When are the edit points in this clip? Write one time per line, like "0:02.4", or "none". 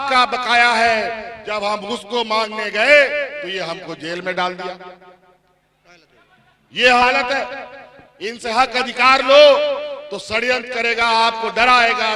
none

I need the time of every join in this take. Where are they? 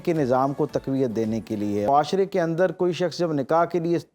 0:01.9

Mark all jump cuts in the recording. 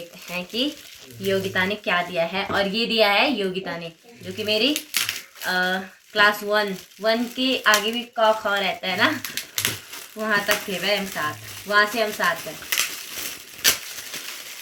none

